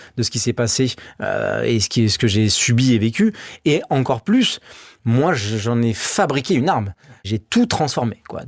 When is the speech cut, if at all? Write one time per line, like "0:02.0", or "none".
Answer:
0:07.2